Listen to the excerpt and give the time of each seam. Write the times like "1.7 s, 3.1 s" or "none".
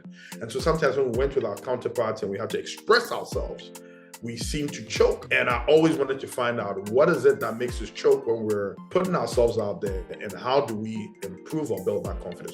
5.2 s, 8.8 s